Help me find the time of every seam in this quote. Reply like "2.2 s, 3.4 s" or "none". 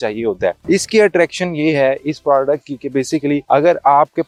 none